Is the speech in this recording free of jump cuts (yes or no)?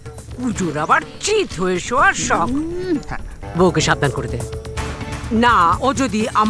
no